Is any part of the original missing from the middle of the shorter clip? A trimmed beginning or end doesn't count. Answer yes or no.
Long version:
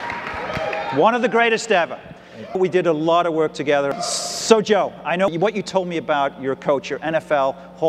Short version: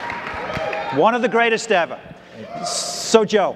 yes